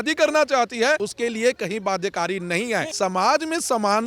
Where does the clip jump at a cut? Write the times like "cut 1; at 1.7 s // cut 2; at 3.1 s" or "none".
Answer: cut 1; at 1.0 s // cut 2; at 2.9 s